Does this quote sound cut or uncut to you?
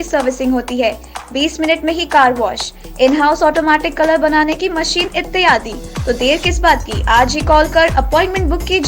uncut